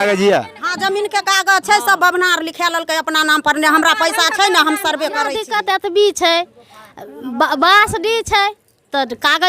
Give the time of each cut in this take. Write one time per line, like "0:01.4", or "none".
0:05.4